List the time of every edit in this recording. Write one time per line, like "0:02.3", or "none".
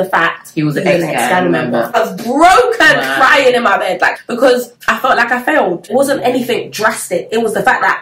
0:02.0
0:05.9